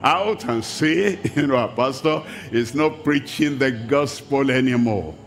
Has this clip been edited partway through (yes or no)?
no